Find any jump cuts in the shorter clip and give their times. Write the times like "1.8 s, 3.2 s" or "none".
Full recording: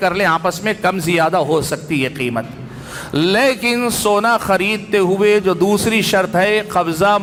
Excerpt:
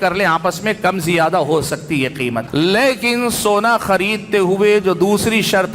2.5 s